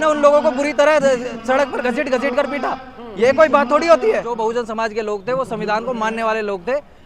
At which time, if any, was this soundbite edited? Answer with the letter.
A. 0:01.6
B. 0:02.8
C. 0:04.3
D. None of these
C